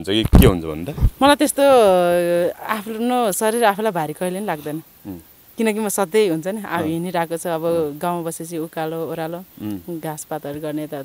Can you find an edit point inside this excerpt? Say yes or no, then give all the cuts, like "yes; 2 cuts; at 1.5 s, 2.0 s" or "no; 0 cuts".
no; 0 cuts